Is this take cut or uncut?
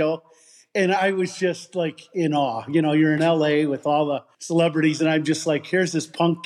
cut